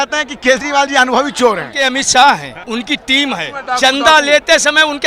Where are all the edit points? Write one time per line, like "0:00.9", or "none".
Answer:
0:01.7
0:02.5
0:03.5